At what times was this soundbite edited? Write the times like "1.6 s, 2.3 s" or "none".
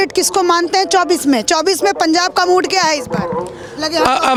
none